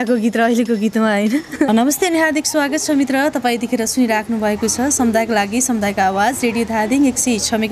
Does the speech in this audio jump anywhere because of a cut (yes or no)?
yes